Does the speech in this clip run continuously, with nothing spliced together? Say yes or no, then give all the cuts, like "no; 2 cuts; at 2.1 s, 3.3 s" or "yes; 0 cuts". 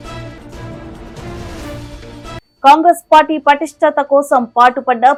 yes; 0 cuts